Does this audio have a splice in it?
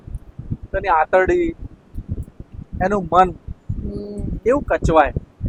no; 0 cuts

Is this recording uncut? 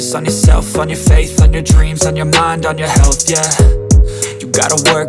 yes; 0 cuts

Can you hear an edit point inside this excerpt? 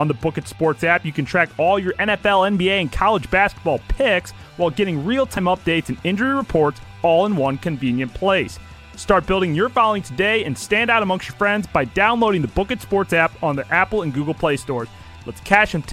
yes; 1 cut; at 5.4 s

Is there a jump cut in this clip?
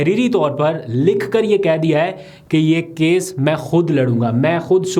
no; 0 cuts

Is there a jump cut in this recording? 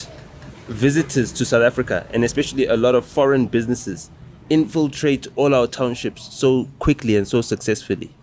no; 0 cuts

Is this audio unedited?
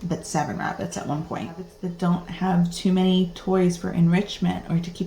no; 1 cut; at 1.8 s

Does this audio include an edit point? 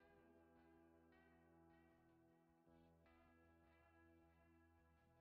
no; 0 cuts

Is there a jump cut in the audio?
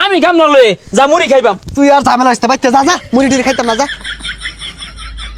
yes; 1 cut; at 3.9 s

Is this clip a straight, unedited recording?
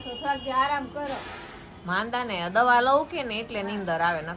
yes; 0 cuts

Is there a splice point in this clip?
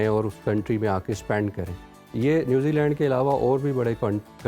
no; 0 cuts

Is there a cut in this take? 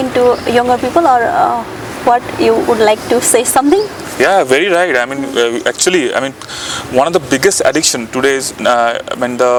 no; 0 cuts

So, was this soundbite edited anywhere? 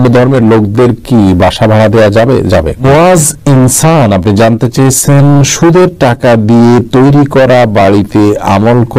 yes; 1 cut; at 2.8 s

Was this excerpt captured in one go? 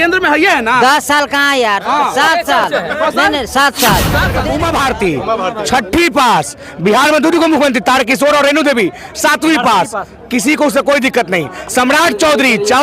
no; 1 cut; at 4.3 s

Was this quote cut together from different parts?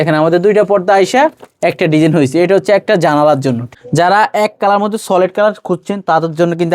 yes; 1 cut; at 3.7 s

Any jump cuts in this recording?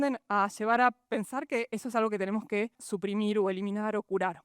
yes; 1 cut; at 2.8 s

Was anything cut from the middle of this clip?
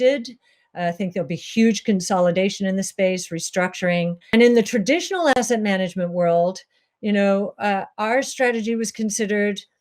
yes; 1 cut; at 4.2 s

